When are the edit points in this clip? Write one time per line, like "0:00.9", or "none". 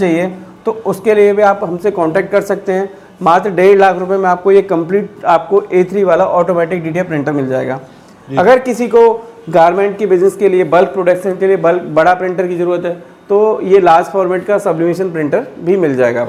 none